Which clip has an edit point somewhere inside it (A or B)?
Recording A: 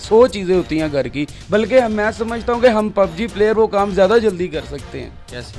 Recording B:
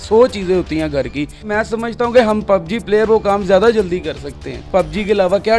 B